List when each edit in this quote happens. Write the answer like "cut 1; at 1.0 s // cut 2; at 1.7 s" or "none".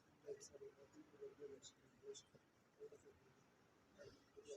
none

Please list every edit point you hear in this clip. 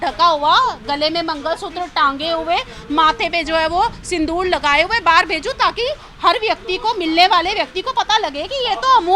none

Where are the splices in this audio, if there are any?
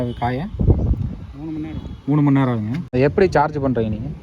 cut 1; at 2.8 s

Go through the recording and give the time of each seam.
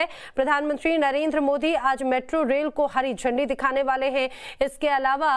cut 1; at 1.1 s

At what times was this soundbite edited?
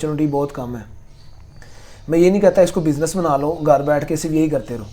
none

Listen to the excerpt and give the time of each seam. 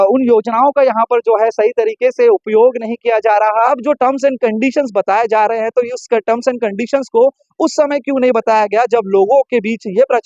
cut 1; at 3.7 s

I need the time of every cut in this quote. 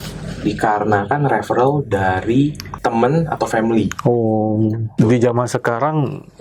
cut 1; at 2.7 s // cut 2; at 5.0 s

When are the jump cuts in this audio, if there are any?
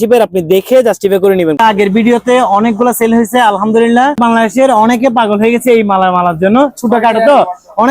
cut 1; at 1.6 s // cut 2; at 4.2 s

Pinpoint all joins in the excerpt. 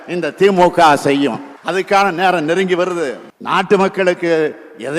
cut 1; at 1.5 s // cut 2; at 3.3 s

